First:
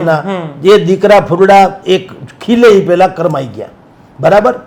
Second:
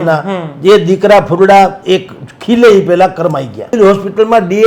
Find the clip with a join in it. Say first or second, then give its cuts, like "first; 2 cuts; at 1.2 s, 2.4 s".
second; 1 cut; at 3.7 s